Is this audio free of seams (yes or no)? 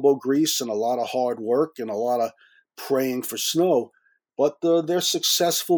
yes